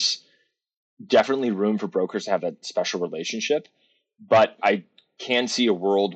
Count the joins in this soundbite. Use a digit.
2